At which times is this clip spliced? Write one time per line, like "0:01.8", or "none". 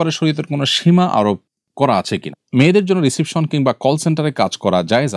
0:02.4